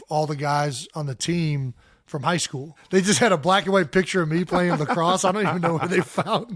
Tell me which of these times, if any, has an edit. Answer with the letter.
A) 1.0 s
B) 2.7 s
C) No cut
B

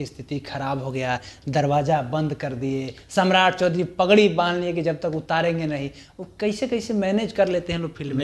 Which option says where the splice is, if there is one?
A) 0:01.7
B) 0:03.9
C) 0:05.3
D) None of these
D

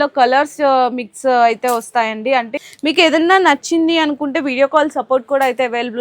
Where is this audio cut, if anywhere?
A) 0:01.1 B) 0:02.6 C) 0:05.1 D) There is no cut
B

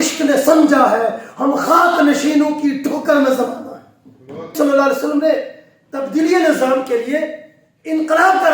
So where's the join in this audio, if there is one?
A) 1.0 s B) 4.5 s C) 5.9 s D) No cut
B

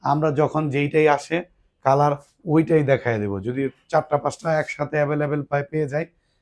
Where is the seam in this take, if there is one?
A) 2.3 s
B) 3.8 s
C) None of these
C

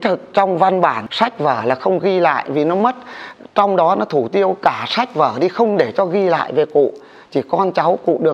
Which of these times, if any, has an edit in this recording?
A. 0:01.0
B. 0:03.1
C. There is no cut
A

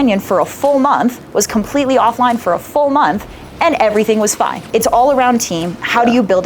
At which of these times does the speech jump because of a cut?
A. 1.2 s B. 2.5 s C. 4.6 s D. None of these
C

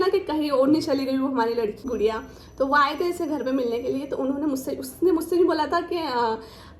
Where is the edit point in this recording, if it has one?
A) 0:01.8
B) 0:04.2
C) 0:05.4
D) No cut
A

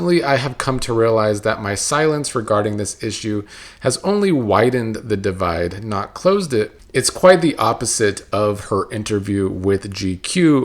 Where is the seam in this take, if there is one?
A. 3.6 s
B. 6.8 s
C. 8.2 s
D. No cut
B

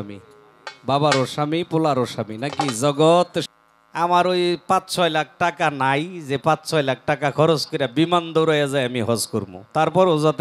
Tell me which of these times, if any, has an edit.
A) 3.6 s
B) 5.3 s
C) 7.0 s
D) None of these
A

